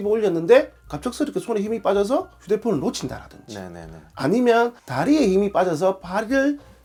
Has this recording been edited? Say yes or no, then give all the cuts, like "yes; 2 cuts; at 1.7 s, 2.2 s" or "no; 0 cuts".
no; 0 cuts